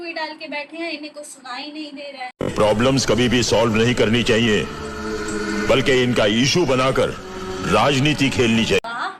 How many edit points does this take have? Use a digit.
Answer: 0